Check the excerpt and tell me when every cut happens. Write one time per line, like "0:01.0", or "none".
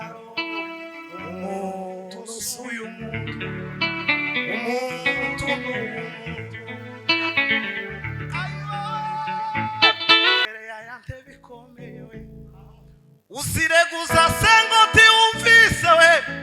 0:10.4